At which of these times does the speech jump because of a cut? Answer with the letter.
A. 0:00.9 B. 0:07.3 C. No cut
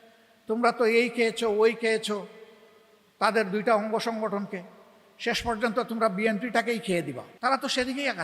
B